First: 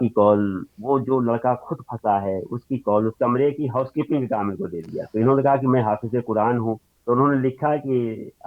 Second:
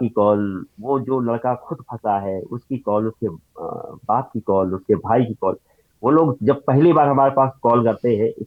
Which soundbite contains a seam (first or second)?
first